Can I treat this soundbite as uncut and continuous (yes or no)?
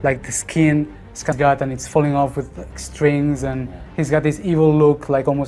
no